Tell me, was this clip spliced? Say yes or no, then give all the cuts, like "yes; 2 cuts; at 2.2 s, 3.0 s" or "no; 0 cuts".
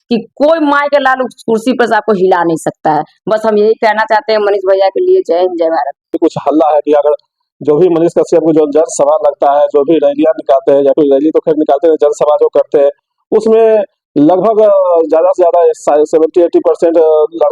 yes; 1 cut; at 6.1 s